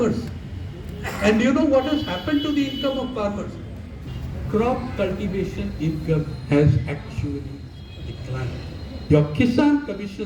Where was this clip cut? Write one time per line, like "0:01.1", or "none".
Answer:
0:03.9